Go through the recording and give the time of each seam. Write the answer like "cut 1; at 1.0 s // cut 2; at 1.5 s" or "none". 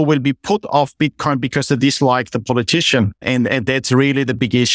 cut 1; at 3.2 s